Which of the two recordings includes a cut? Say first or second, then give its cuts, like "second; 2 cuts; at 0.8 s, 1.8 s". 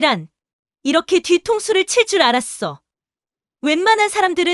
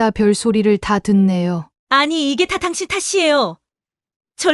second; 1 cut; at 1.7 s